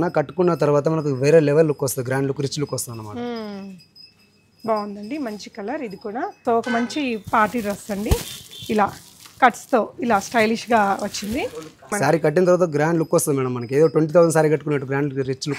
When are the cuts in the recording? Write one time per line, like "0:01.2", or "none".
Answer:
0:06.4
0:11.9